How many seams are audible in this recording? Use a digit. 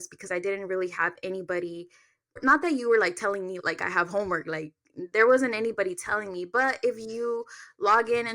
1